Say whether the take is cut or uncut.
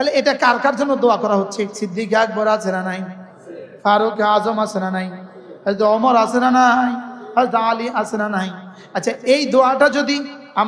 cut